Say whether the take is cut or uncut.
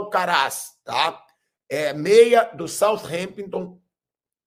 uncut